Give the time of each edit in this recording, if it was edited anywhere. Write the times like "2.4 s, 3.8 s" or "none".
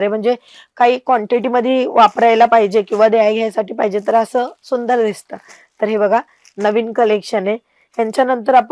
none